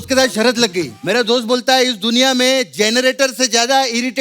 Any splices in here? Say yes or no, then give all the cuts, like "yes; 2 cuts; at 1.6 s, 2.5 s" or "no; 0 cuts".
yes; 1 cut; at 1.0 s